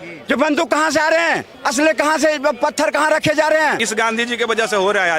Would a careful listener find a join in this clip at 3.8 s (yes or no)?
yes